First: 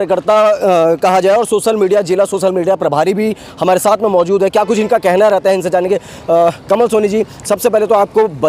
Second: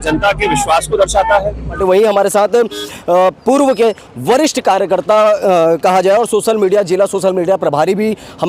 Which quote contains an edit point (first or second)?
second